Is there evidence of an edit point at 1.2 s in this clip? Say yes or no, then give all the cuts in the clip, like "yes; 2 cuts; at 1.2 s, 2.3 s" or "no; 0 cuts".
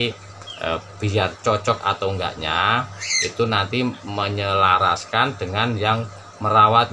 no; 0 cuts